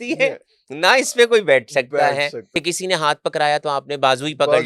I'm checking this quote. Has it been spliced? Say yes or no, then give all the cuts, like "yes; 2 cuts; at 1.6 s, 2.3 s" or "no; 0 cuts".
yes; 1 cut; at 2.4 s